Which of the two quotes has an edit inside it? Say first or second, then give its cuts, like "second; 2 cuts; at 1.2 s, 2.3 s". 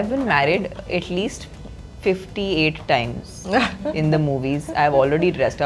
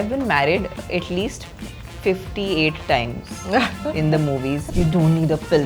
second; 1 cut; at 4.7 s